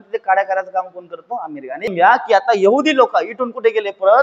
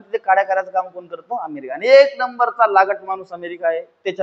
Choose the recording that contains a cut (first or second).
first